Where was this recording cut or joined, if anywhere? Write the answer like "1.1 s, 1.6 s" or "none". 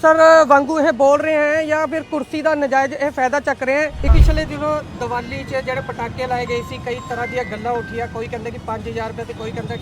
4.1 s